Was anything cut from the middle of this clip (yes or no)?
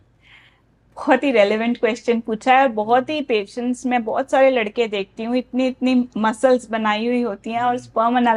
no